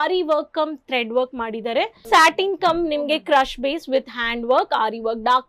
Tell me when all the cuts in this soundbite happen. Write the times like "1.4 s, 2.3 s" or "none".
2.0 s